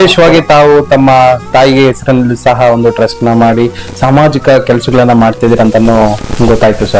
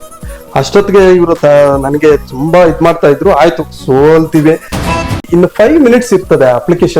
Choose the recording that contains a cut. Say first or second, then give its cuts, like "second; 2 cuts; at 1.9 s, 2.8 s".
second; 1 cut; at 5.1 s